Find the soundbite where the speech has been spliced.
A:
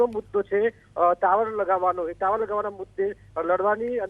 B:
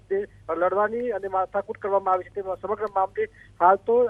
A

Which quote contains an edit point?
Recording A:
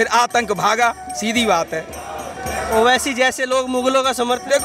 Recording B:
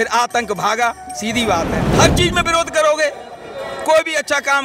B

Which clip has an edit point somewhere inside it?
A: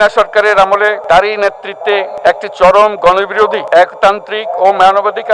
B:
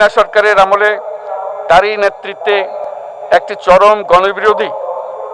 A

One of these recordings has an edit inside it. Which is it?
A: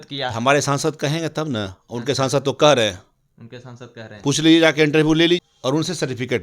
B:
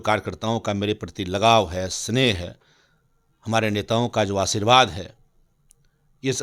A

